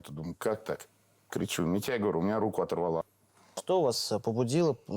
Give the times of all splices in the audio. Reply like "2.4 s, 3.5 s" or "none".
3.0 s